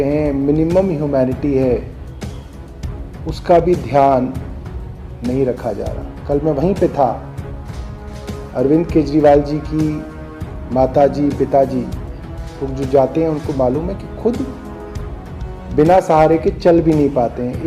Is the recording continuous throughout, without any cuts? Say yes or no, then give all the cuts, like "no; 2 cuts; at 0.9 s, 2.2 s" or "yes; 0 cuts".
yes; 0 cuts